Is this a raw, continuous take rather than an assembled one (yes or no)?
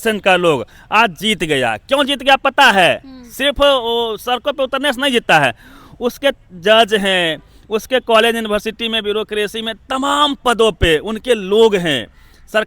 yes